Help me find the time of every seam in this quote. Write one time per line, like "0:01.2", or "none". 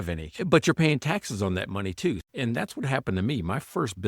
0:02.2